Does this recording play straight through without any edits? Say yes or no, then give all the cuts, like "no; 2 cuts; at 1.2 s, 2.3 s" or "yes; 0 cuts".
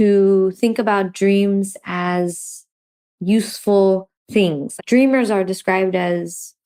yes; 0 cuts